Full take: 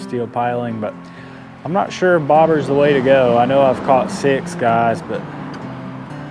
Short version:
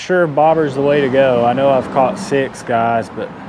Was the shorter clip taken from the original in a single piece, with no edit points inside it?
yes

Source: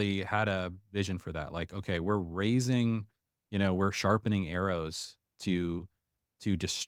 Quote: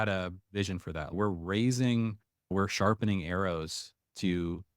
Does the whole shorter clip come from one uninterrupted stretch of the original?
no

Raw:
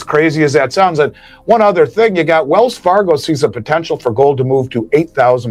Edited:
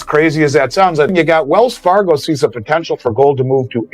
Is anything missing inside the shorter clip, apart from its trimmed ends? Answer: yes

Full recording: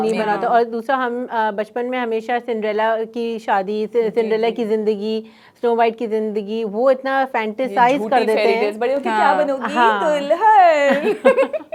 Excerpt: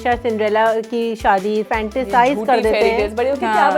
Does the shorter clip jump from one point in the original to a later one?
yes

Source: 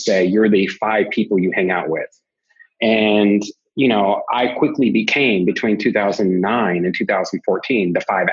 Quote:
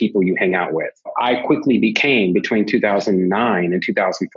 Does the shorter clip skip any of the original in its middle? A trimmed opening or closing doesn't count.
yes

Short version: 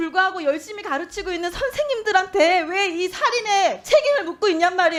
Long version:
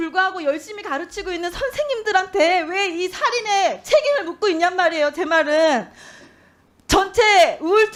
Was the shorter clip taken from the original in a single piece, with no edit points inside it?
yes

